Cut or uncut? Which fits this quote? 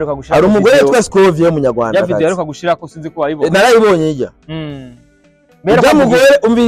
uncut